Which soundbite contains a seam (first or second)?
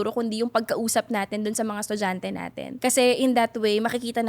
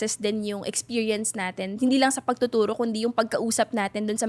first